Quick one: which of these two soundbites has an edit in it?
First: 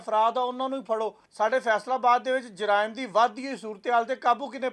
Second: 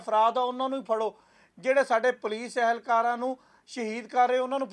first; 1 cut; at 1.2 s

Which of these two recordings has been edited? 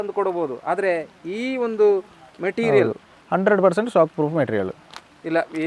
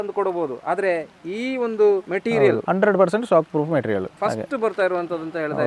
second; 2 cuts; at 2.3 s, 4.1 s

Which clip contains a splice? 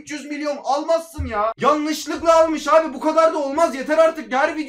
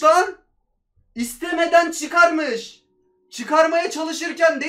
first; 1 cut; at 1.6 s

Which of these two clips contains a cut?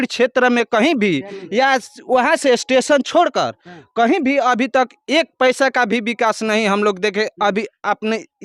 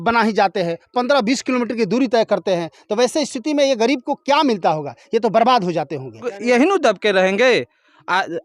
second; 1 cut; at 6.3 s

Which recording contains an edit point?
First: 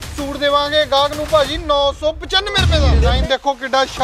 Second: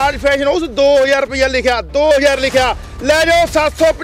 first; 1 cut; at 2.9 s

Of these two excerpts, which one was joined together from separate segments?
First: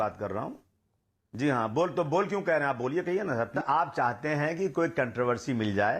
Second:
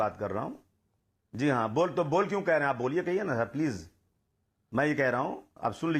first; 1 cut; at 3.6 s

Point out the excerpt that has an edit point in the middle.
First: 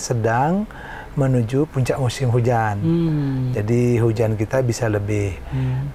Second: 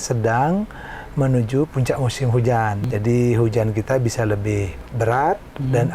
second; 2 cuts; at 2.8 s, 4.8 s

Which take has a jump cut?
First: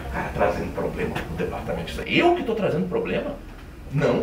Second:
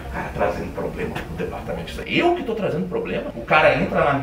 second; 1 cut; at 3.3 s

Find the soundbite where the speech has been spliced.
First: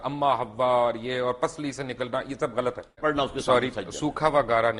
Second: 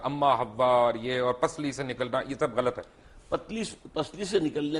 first; 1 cut; at 3.0 s

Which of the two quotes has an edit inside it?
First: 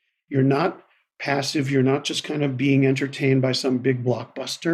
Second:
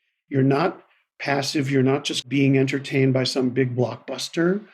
second; 1 cut; at 2.2 s

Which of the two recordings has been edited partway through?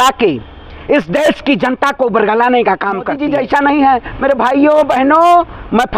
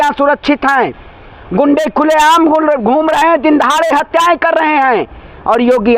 first; 1 cut; at 3.2 s

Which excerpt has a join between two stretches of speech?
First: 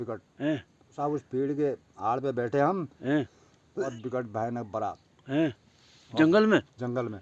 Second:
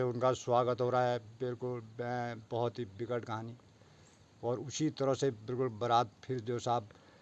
first; 2 cuts; at 1.0 s, 3.9 s

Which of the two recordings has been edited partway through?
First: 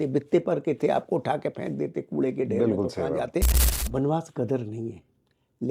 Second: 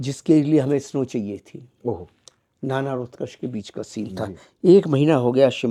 first; 1 cut; at 3.6 s

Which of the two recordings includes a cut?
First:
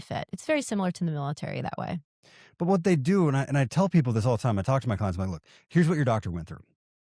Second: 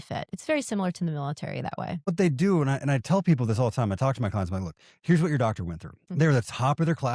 second; 2 cuts; at 2.1 s, 6.1 s

